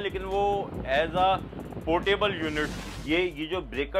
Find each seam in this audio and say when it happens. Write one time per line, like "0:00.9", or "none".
0:02.8